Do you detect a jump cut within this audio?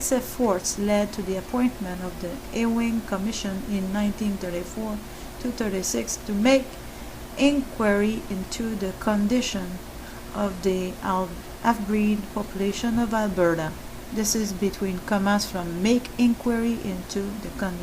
no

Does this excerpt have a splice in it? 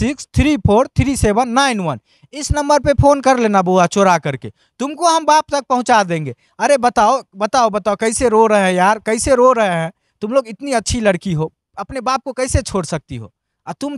no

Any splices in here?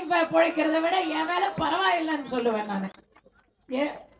no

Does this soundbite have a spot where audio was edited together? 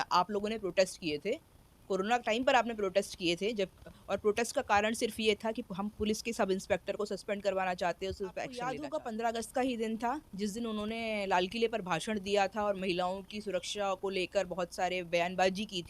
yes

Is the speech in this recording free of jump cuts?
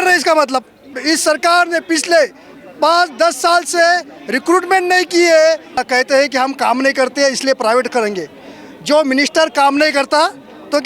no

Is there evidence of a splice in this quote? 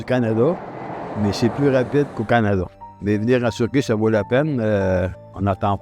yes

